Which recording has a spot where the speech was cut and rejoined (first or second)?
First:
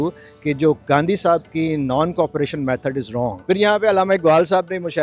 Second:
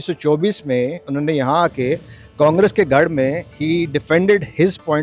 first